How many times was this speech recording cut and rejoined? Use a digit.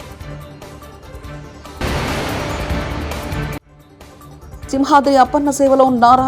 1